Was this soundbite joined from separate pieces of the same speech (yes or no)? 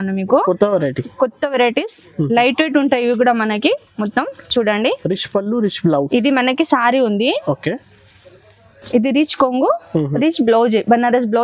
no